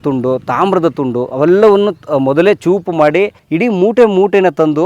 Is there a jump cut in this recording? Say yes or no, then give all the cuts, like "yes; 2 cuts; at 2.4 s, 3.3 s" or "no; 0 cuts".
yes; 1 cut; at 3.4 s